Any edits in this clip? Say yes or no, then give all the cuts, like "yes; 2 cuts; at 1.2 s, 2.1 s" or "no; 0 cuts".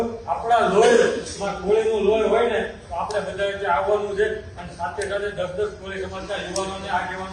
no; 0 cuts